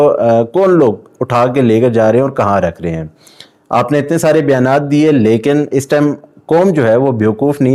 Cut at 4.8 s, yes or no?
no